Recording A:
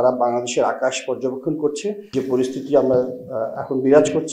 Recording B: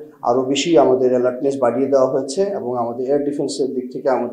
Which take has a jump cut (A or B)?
A